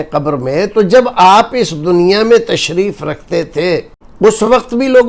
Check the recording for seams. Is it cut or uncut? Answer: uncut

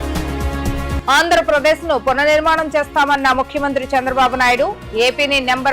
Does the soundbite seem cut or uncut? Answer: cut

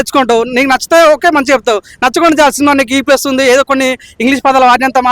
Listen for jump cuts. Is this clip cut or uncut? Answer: uncut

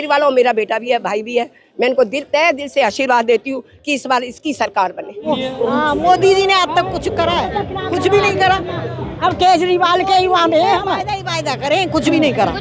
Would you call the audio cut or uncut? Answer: cut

